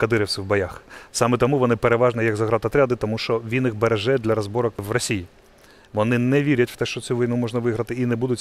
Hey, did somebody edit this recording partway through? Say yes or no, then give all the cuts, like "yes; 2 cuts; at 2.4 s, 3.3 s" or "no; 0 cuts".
yes; 1 cut; at 4.8 s